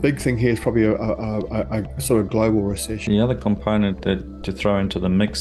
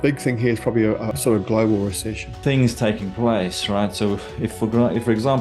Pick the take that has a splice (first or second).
second